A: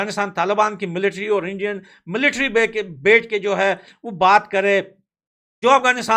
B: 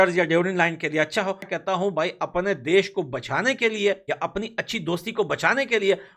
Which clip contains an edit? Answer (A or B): B